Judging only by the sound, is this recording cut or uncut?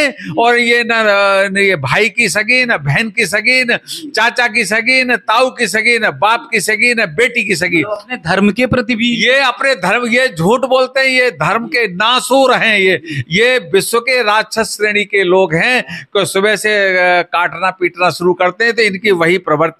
uncut